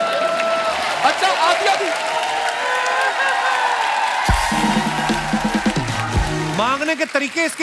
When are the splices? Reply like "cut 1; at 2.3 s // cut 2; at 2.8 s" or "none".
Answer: cut 1; at 6.5 s